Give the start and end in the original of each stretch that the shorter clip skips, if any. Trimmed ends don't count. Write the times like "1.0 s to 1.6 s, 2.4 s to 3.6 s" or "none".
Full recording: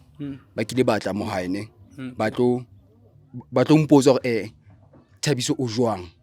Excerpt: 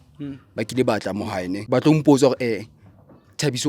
1.6 s to 3.5 s